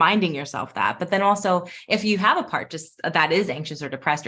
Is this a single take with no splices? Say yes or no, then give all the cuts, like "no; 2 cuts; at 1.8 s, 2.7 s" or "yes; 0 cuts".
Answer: yes; 0 cuts